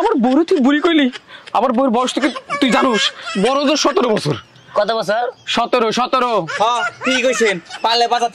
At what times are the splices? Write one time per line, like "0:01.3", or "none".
none